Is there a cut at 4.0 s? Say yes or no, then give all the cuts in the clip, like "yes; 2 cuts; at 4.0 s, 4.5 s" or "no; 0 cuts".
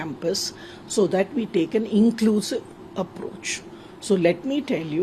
no; 0 cuts